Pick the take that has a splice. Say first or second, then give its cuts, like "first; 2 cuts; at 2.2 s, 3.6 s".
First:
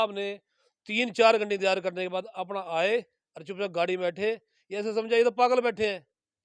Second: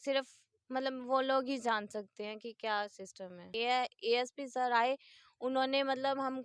second; 1 cut; at 3.5 s